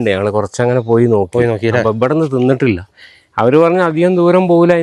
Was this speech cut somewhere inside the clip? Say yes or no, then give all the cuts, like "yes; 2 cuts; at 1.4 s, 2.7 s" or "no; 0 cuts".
no; 0 cuts